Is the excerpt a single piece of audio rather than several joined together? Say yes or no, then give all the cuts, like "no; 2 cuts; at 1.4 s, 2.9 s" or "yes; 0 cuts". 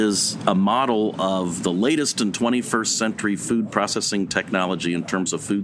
yes; 0 cuts